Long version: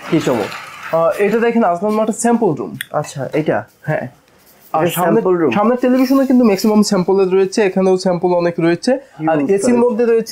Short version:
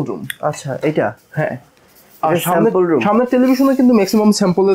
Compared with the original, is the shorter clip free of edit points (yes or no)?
yes